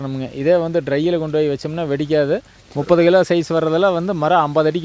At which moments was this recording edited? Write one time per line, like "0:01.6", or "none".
0:02.6